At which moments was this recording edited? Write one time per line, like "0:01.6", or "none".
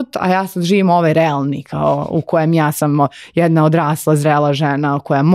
none